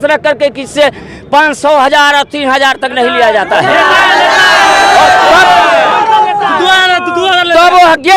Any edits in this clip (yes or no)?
no